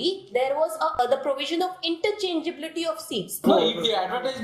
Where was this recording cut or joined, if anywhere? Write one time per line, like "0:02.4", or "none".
0:01.0
0:03.4

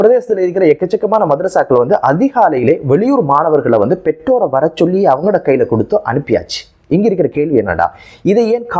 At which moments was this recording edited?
none

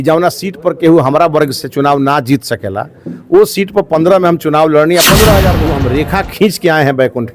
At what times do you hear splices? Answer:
0:05.7

